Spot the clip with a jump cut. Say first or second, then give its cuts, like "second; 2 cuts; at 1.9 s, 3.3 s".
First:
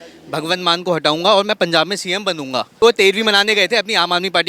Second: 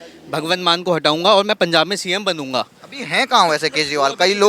first; 1 cut; at 2.8 s